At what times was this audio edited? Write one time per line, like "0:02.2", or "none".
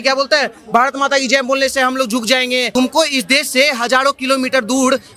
0:02.7